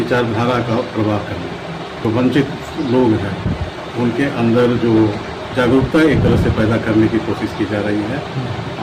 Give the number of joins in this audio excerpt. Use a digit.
0